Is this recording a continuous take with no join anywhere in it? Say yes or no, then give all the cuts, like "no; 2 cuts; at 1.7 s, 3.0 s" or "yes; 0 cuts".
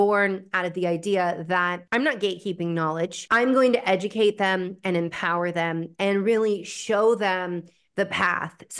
no; 2 cuts; at 1.8 s, 3.2 s